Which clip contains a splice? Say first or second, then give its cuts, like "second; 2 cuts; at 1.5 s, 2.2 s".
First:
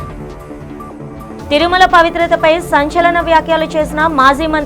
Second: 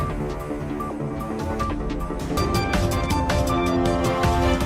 first; 1 cut; at 1.5 s